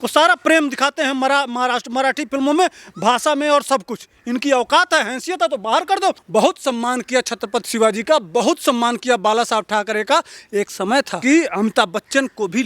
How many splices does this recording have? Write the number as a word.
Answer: two